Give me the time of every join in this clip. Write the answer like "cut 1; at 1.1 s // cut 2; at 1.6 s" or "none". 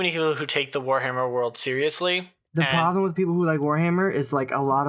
cut 1; at 2.3 s